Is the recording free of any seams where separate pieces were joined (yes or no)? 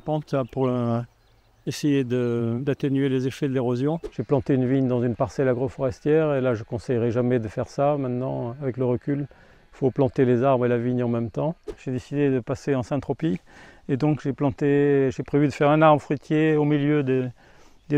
no